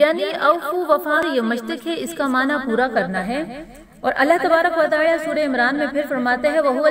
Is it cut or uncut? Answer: cut